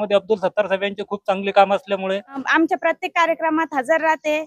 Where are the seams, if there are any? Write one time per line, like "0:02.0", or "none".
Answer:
0:02.4